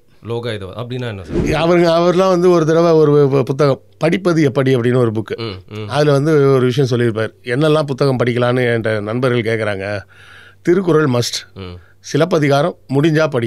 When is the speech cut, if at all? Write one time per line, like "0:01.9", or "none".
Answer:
0:01.4